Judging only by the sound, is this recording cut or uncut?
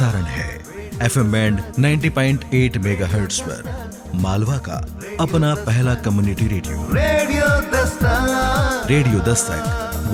uncut